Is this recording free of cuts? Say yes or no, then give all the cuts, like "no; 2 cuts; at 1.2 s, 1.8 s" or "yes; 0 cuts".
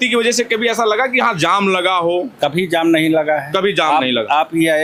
yes; 0 cuts